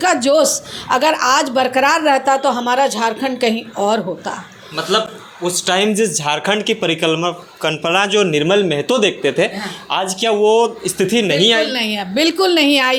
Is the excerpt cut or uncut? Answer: uncut